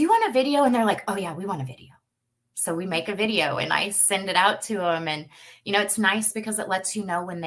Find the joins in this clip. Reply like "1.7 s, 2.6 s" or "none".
none